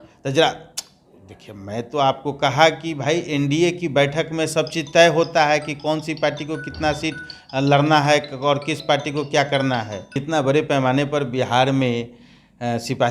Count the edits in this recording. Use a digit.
1